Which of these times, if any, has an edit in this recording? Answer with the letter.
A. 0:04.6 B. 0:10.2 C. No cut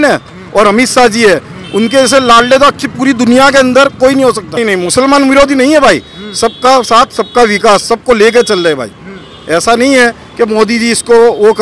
A